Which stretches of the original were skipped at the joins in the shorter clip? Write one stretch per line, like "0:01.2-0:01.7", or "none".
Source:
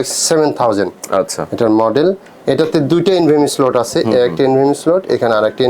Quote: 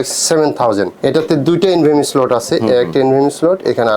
0:00.9-0:02.4